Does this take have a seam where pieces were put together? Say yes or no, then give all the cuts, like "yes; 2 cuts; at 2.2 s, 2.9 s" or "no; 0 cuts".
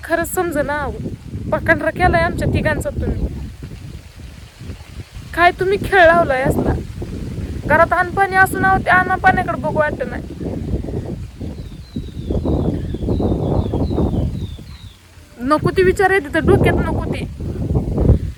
no; 0 cuts